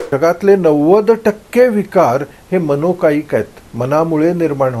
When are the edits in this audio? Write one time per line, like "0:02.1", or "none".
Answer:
none